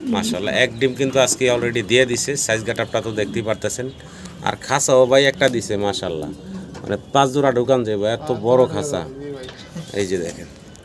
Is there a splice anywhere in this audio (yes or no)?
no